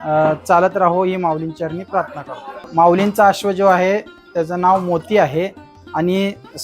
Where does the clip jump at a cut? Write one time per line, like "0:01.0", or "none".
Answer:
0:02.7

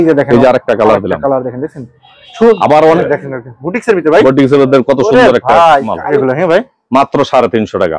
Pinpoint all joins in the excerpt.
0:03.0
0:06.1

